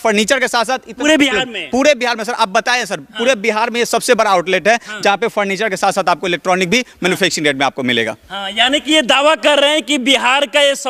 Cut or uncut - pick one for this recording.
uncut